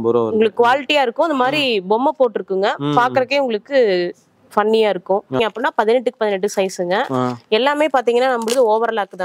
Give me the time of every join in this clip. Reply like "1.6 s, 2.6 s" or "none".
5.4 s